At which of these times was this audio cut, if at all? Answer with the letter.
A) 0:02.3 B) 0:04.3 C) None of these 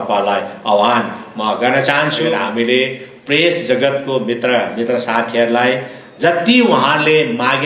A